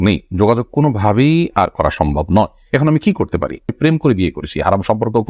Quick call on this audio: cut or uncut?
cut